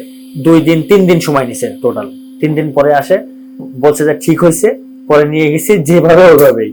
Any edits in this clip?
no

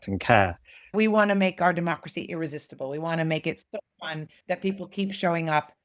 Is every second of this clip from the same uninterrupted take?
no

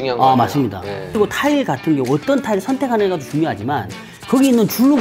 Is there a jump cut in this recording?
yes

